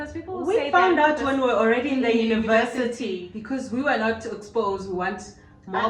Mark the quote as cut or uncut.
cut